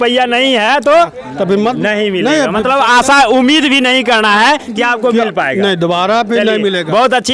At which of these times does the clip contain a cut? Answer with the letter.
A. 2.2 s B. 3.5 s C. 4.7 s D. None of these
D